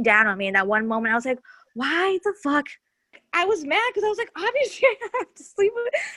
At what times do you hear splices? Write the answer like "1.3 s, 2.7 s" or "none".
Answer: 3.2 s